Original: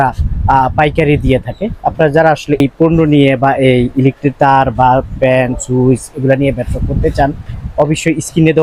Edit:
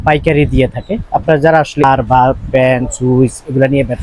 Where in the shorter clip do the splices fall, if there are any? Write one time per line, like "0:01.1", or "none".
0:01.8